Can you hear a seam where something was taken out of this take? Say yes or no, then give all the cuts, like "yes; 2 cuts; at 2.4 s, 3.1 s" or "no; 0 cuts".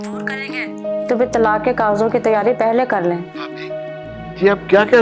no; 0 cuts